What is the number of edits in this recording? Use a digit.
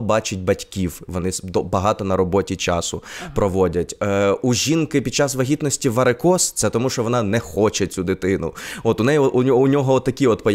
0